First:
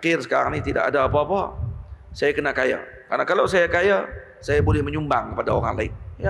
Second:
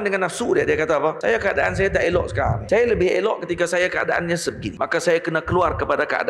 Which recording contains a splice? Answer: second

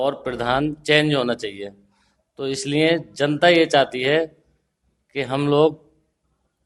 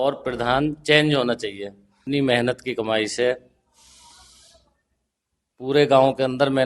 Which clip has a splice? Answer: second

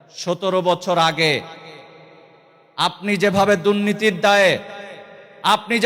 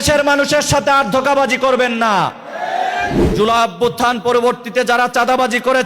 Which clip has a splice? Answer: second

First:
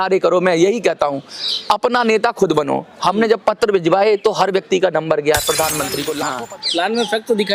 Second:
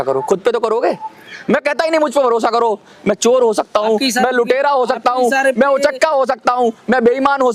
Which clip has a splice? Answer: first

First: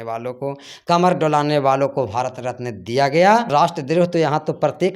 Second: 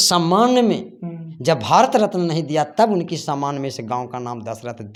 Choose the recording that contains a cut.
first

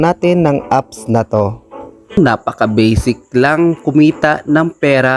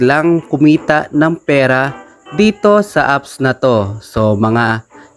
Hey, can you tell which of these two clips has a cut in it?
first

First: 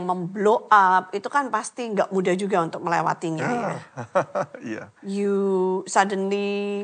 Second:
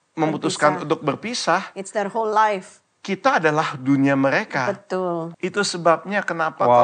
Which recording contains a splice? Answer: second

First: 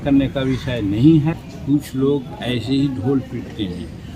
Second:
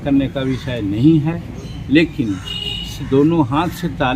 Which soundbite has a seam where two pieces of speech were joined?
first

